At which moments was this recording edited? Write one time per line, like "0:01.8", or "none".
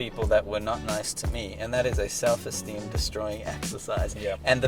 none